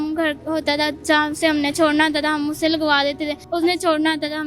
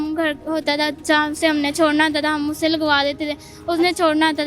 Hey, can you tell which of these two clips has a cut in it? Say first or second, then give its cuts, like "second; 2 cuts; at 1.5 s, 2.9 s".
first; 1 cut; at 3.4 s